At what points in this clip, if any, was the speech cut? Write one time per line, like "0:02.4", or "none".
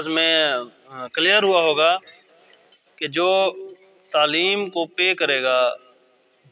none